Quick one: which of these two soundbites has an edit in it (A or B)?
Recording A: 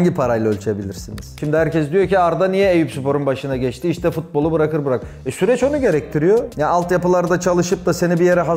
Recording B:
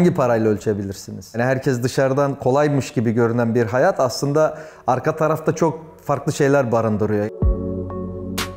A